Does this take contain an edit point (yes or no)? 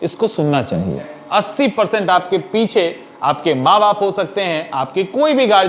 yes